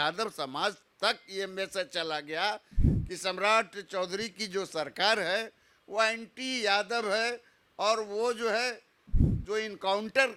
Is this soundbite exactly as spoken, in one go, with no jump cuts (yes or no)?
yes